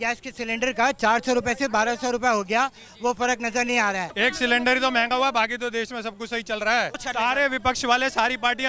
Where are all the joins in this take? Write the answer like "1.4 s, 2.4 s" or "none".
4.1 s, 7.0 s